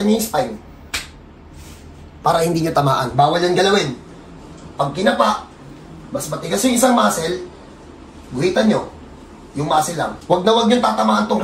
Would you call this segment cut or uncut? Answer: cut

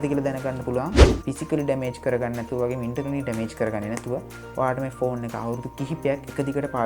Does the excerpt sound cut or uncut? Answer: cut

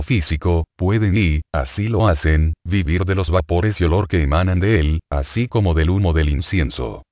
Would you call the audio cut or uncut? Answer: uncut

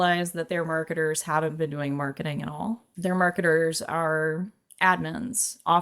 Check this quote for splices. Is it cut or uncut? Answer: cut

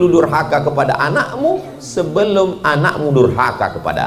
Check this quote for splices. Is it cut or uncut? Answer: uncut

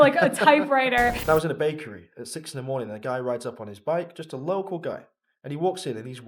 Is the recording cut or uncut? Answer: cut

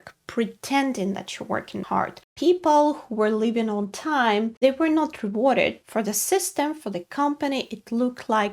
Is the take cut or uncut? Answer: cut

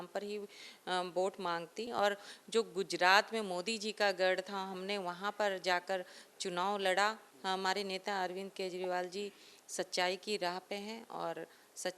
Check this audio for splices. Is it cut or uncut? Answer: cut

